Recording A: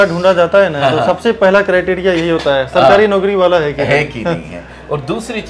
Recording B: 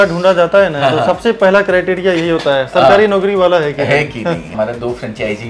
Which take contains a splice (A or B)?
B